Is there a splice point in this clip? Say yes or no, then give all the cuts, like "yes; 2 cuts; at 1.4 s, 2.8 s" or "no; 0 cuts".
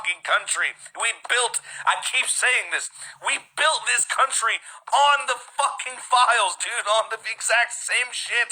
no; 0 cuts